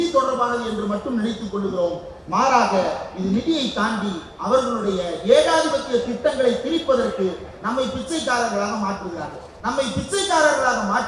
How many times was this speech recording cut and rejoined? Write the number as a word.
one